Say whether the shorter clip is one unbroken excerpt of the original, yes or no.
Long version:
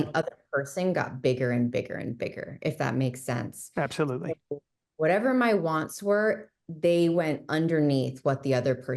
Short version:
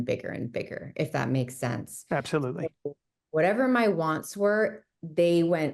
yes